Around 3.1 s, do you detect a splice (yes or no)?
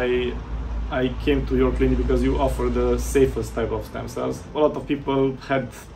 no